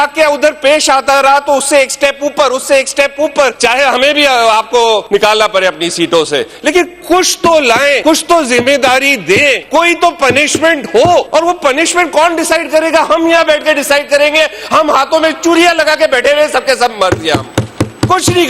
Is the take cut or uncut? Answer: cut